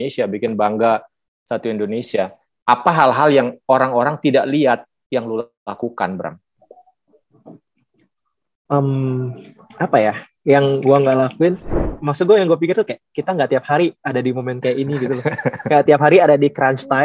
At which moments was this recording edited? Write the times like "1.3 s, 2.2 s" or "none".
11.9 s